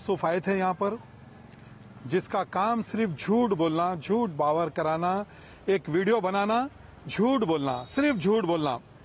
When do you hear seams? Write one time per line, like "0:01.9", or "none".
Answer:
none

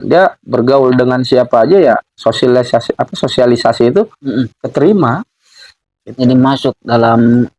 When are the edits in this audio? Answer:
none

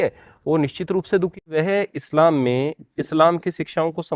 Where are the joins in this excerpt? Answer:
0:01.3

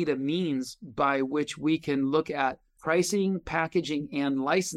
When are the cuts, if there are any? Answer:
0:02.7

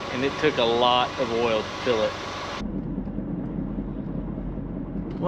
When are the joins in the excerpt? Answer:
none

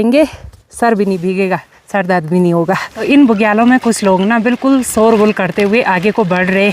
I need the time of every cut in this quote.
0:03.0

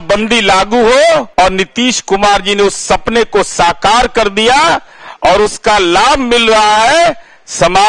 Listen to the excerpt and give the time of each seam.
0:01.3

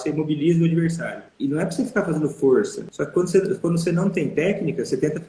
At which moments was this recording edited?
0:01.2
0:02.8

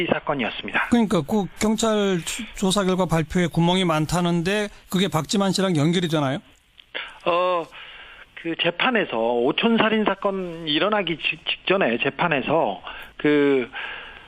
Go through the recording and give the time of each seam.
none

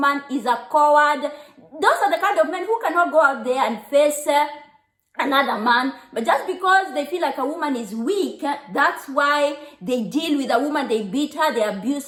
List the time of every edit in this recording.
none

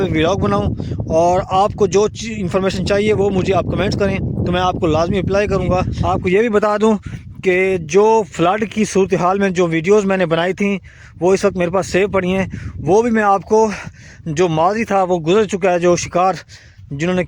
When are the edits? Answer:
0:05.9

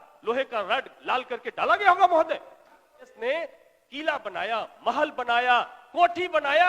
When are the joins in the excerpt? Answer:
0:03.1

